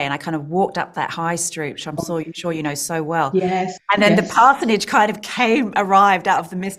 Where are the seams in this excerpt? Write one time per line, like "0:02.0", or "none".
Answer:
none